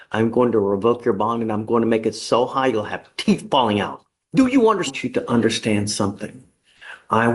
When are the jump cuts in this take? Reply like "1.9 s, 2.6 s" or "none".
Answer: 4.9 s